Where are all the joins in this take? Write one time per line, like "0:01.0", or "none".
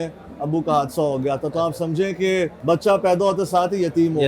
0:02.6